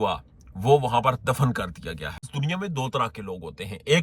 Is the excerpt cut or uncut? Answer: cut